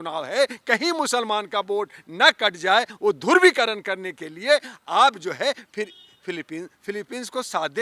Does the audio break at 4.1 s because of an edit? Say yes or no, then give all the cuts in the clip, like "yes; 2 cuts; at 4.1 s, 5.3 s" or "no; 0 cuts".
no; 0 cuts